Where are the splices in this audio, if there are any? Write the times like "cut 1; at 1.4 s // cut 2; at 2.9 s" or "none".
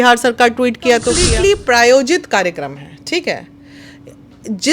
cut 1; at 1.2 s